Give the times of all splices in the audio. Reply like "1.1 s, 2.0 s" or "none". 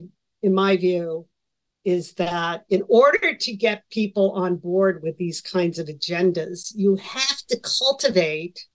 none